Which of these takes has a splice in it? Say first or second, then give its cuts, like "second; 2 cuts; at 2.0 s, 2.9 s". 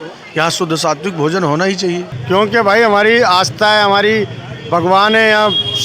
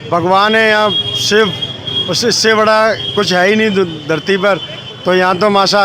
first; 1 cut; at 2.1 s